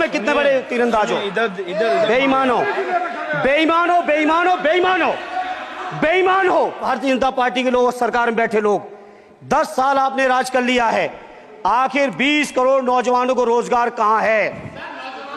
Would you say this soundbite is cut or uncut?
cut